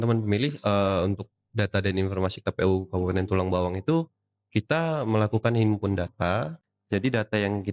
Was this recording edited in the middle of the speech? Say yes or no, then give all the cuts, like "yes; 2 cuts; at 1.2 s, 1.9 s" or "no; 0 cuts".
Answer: yes; 1 cut; at 6.5 s